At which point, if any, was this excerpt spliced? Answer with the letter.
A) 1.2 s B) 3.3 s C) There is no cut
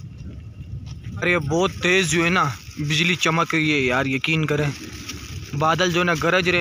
A